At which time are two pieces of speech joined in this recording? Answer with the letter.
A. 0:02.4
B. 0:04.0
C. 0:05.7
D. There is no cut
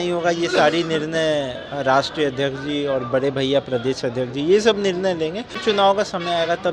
C